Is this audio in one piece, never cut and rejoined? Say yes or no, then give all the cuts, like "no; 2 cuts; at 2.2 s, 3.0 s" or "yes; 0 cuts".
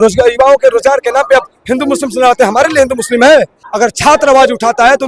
no; 1 cut; at 3.6 s